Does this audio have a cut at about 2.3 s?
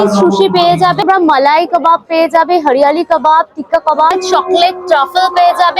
no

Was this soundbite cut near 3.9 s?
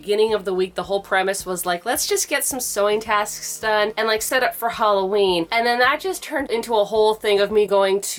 no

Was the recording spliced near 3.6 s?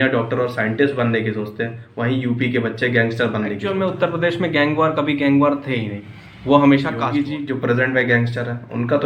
yes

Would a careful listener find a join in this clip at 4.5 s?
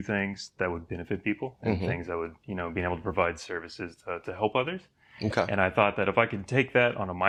no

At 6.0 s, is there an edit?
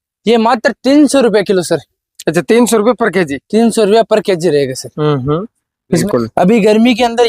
yes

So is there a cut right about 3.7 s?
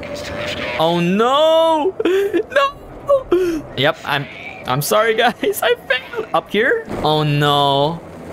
yes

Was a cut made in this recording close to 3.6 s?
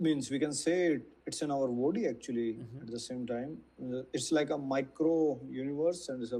no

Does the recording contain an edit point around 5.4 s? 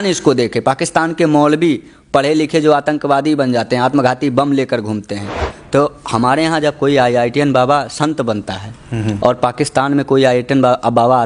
yes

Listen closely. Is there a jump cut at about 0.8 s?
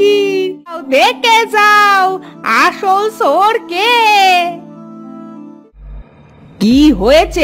yes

